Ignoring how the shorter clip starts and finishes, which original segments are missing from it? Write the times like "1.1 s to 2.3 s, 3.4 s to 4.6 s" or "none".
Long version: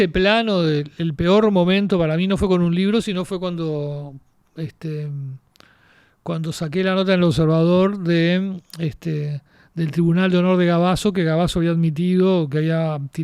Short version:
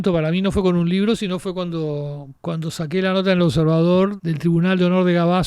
4.1 s to 6.1 s, 8.0 s to 9.7 s